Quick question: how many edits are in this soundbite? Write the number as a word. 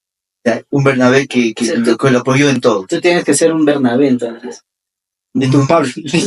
zero